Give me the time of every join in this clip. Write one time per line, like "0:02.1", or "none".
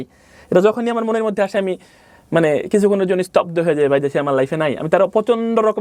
none